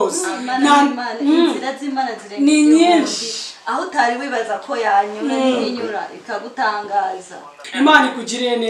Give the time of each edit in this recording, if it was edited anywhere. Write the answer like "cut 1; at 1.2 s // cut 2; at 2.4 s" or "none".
cut 1; at 7.6 s